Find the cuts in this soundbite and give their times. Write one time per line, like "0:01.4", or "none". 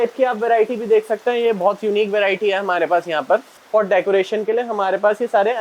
0:03.6